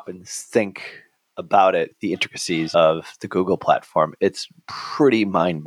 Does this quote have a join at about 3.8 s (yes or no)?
no